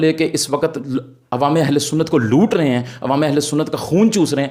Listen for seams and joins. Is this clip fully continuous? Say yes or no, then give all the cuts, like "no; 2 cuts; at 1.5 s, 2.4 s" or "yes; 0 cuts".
yes; 0 cuts